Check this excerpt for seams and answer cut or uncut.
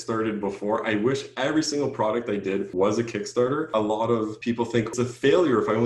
cut